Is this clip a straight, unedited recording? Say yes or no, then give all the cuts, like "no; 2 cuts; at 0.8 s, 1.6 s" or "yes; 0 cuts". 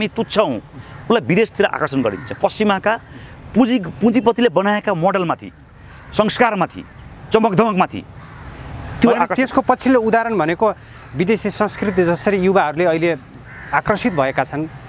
yes; 0 cuts